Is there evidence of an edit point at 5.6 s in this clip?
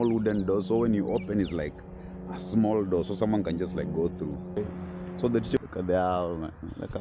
yes; 1 cut; at 5.6 s

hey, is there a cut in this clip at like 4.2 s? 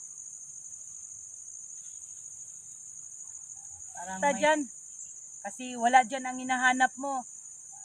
yes; 1 cut; at 4.2 s

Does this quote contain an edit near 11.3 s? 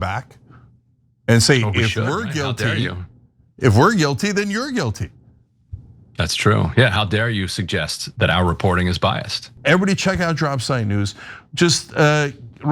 no; 1 cut; at 9.5 s

